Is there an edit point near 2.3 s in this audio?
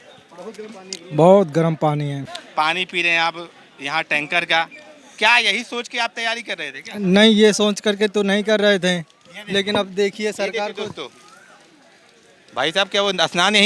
yes; 1 cut; at 2.3 s

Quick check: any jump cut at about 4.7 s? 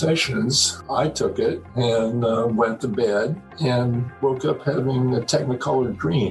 no; 0 cuts

